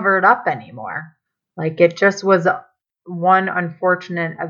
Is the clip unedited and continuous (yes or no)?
yes